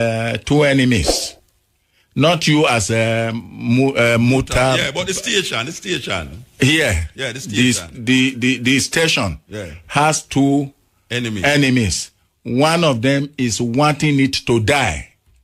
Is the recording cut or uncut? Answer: uncut